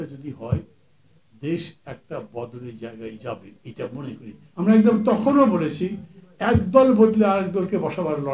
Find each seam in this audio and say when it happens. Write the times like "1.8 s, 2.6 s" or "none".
4.4 s